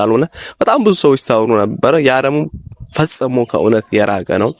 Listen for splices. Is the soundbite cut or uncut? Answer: uncut